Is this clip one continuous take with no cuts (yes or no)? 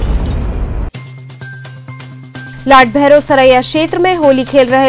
no